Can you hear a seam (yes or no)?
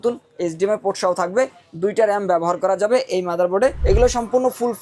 yes